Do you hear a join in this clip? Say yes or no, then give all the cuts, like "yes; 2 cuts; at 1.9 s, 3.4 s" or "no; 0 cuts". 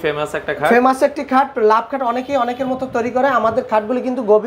no; 0 cuts